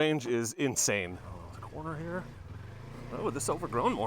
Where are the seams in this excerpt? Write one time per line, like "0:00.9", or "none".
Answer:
0:01.2